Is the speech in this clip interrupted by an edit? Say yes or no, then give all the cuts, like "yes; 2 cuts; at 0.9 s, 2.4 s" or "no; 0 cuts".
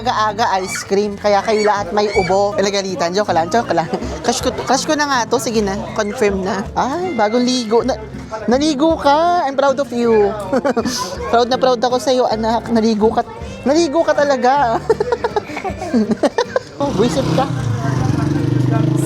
yes; 3 cuts; at 2.5 s, 6.6 s, 16.8 s